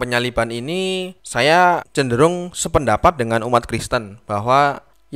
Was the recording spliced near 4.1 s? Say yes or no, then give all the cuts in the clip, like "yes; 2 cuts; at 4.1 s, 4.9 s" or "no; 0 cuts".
no; 2 cuts; at 1.2 s, 1.9 s